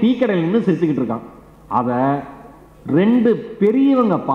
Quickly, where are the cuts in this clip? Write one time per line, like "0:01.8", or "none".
none